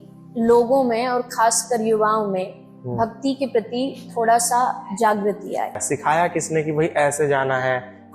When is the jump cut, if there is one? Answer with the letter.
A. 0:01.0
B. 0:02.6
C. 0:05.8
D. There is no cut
C